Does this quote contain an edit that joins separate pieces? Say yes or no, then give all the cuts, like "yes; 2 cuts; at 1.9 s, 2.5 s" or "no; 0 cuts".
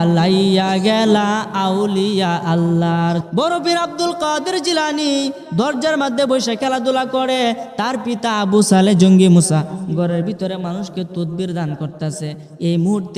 yes; 1 cut; at 3.2 s